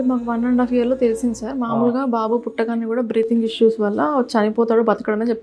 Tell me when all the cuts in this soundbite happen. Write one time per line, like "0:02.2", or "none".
none

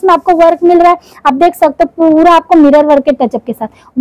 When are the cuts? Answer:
none

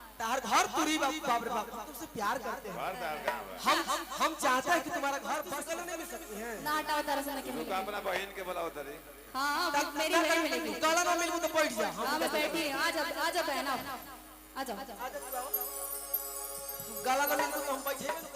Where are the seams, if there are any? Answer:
0:05.6

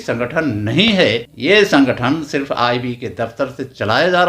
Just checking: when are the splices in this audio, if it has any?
0:01.3

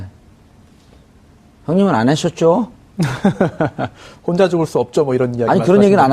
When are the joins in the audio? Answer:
0:03.5

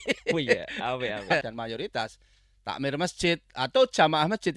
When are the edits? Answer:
0:01.5

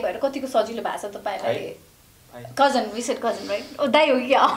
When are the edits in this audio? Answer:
none

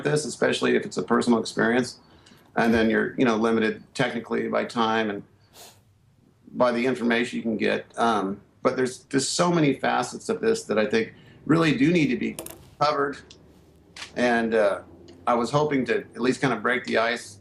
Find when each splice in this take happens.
0:06.6

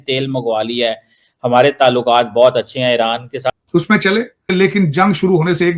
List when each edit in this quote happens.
0:03.5
0:04.5

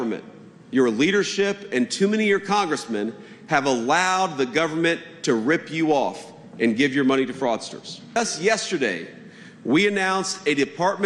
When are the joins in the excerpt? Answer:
0:08.2

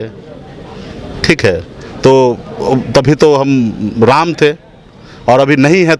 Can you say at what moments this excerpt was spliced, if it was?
none

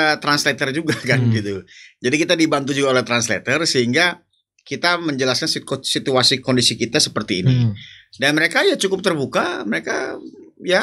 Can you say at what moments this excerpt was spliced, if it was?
none

